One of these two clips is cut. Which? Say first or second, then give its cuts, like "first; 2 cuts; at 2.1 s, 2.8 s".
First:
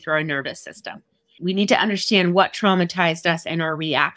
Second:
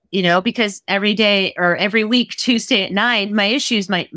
first; 1 cut; at 1.3 s